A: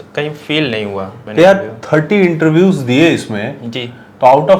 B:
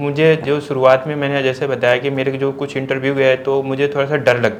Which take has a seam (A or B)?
A